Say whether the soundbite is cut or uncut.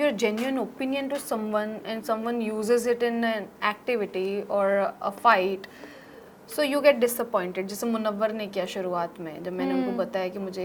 uncut